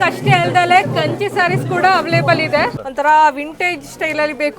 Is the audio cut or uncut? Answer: cut